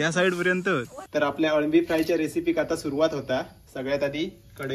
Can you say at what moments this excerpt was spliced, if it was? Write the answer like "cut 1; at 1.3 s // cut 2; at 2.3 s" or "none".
cut 1; at 1.0 s